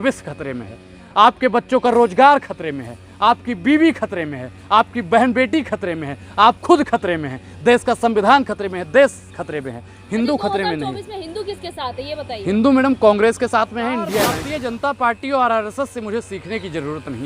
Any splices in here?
yes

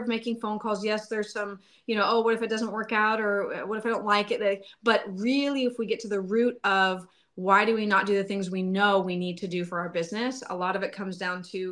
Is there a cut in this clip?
no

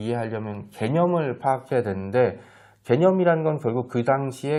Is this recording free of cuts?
yes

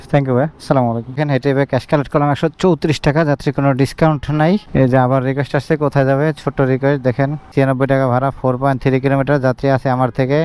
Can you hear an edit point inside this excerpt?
no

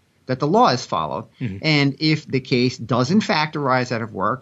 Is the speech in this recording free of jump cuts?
yes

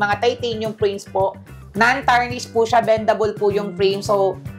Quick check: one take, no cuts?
yes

